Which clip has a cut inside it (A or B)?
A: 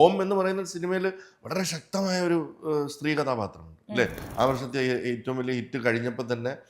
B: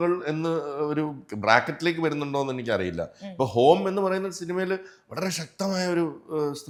A